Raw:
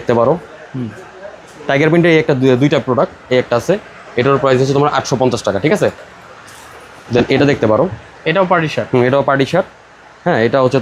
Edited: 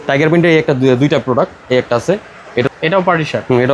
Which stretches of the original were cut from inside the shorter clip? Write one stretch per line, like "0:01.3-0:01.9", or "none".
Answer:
0:04.3-0:08.1